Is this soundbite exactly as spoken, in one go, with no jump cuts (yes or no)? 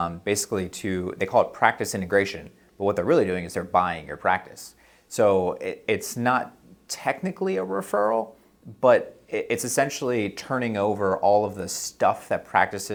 yes